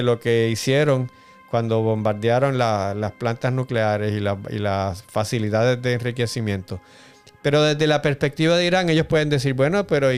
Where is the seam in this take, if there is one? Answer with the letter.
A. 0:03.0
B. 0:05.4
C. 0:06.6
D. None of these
D